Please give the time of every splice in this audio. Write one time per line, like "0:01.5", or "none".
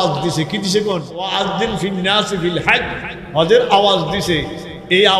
0:01.4